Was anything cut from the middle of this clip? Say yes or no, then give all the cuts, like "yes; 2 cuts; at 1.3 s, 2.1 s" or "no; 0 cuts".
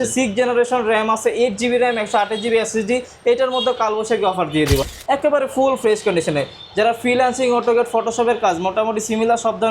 yes; 1 cut; at 4.9 s